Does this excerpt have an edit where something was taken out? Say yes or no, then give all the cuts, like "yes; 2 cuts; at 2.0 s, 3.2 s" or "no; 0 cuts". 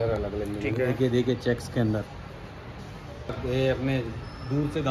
yes; 1 cut; at 3.4 s